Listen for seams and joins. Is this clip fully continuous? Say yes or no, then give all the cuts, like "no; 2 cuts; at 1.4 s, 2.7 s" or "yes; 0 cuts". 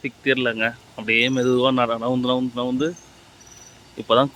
yes; 0 cuts